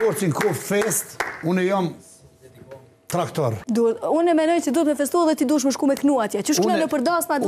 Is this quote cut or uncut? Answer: cut